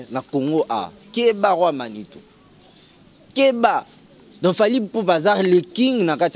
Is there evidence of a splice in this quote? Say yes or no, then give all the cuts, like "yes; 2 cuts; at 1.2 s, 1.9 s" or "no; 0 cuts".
no; 0 cuts